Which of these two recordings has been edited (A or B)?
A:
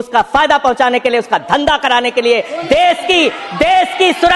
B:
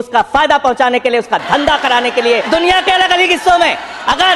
B